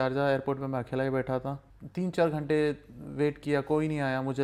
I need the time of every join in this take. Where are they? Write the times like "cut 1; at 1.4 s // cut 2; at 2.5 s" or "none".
none